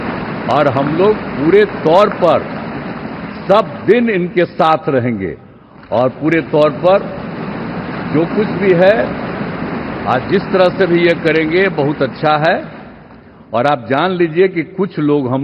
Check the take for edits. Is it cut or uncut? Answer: uncut